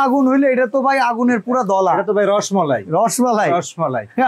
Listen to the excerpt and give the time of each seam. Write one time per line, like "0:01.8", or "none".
none